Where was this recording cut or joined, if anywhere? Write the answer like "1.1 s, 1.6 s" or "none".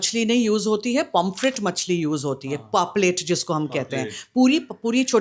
none